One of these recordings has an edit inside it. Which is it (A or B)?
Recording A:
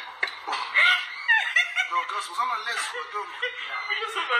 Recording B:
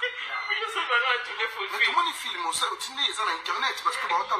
B